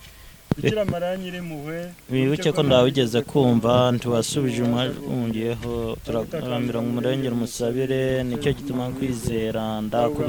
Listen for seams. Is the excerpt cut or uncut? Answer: uncut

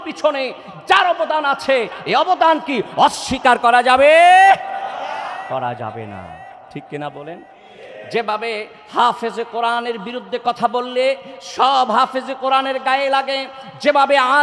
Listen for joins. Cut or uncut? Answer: uncut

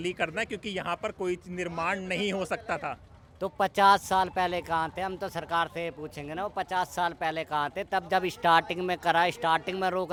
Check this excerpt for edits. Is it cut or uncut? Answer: uncut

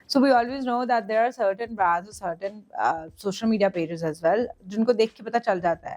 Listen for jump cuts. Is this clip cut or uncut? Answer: uncut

